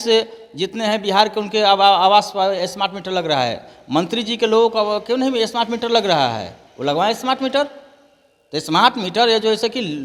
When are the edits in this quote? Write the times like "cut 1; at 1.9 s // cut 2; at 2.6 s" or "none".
none